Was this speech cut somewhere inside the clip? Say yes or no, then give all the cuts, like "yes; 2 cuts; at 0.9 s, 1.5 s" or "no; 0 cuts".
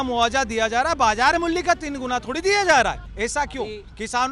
yes; 1 cut; at 3.1 s